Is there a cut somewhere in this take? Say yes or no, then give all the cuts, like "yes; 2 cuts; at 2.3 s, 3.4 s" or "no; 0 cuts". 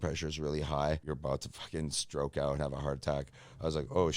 yes; 1 cut; at 1.0 s